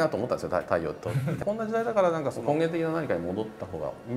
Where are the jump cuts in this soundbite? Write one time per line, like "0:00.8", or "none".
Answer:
0:01.4
0:02.4

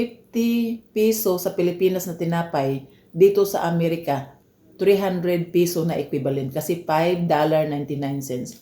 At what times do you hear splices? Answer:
0:04.3

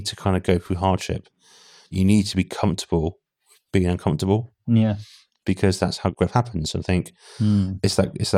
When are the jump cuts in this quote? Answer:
0:01.9
0:06.1

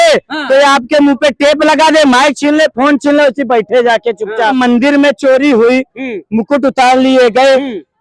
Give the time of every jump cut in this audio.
0:04.5

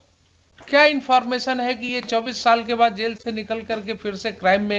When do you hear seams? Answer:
none

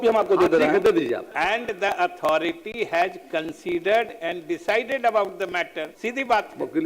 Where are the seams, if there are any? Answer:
0:01.3
0:05.8

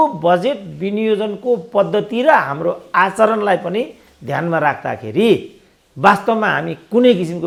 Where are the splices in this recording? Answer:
none

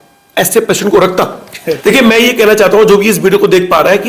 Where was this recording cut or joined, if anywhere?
0:01.8

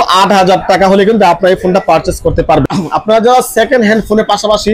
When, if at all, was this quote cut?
0:02.6

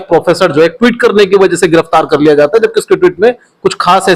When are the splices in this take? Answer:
none

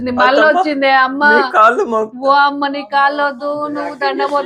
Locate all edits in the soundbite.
none

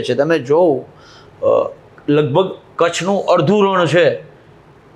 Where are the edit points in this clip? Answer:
none

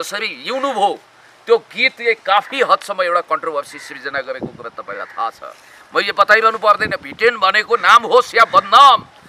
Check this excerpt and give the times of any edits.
none

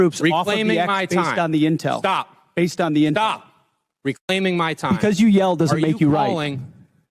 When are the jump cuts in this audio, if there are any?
none

